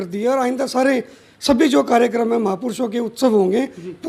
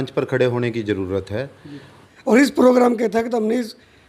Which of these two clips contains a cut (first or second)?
second